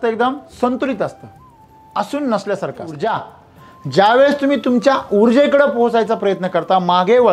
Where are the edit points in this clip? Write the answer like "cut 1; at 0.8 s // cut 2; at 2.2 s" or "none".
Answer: cut 1; at 3.0 s